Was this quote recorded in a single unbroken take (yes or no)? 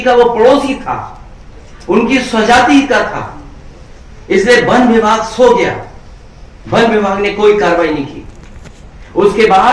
yes